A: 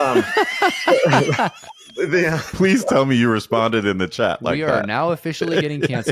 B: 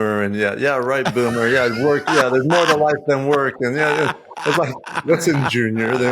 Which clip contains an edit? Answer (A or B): B